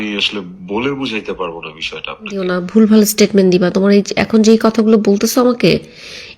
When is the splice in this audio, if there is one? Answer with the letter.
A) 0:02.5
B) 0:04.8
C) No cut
A